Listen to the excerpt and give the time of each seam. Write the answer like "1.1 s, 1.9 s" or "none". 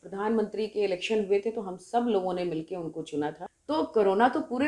3.5 s

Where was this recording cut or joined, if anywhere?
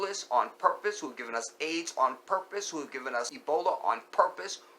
3.3 s

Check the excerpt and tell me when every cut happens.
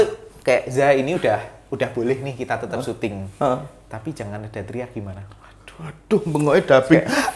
none

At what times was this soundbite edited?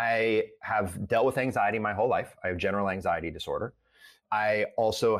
4.2 s

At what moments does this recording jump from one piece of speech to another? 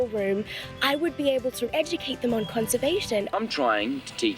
1.7 s, 3.4 s

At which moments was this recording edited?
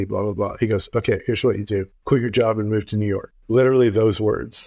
1.9 s, 3.3 s

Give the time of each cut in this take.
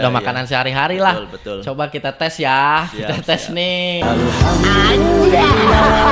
4.0 s

